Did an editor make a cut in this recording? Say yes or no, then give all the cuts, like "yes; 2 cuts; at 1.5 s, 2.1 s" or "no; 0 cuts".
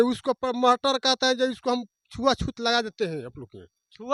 no; 0 cuts